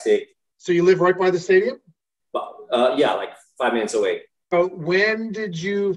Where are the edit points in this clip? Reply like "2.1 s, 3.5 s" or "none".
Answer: 4.5 s